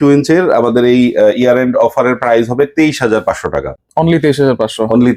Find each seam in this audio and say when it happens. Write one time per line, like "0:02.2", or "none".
none